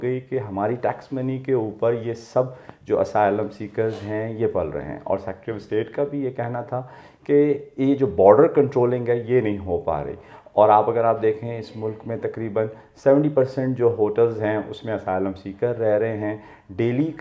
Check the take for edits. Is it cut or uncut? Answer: uncut